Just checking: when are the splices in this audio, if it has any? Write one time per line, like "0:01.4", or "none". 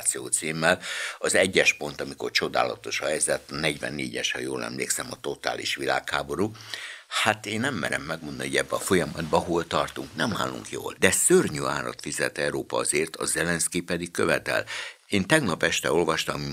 0:10.9